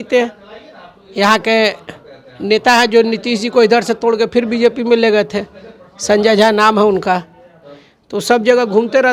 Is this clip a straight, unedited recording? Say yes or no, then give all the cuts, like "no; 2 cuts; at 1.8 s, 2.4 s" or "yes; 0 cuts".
yes; 0 cuts